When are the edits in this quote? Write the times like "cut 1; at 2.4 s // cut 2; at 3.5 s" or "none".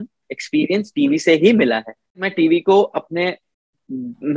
cut 1; at 2.3 s